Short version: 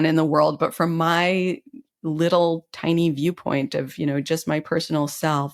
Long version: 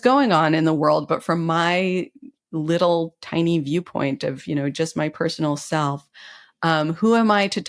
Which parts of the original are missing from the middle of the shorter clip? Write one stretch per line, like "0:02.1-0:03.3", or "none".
none